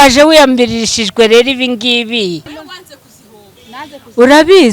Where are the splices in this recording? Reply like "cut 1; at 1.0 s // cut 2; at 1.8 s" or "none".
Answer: cut 1; at 2.5 s